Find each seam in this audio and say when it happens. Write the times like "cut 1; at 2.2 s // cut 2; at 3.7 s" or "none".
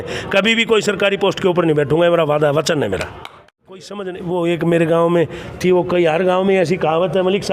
cut 1; at 3.9 s